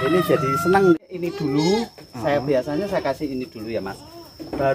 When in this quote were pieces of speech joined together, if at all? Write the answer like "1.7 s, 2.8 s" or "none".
1.0 s